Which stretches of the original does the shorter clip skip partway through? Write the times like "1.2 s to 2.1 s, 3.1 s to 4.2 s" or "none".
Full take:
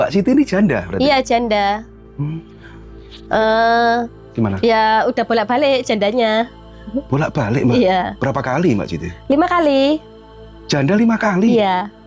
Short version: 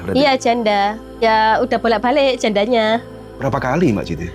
2.1 s to 4.7 s, 6.8 s to 8.2 s